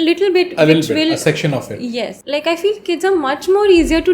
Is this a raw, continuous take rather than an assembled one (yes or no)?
no